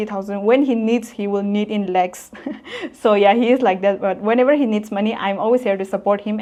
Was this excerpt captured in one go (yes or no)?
yes